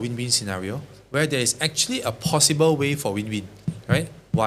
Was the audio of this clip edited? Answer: no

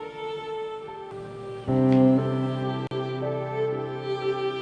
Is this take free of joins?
no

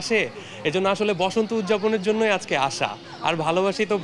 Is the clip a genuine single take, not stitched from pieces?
yes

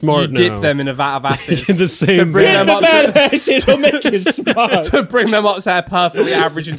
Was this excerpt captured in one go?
yes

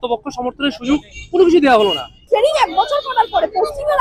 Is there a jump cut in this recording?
yes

